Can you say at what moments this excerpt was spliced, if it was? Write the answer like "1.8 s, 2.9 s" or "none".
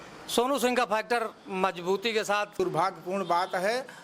2.5 s

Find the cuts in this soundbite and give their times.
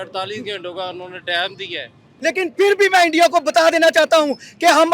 2.1 s

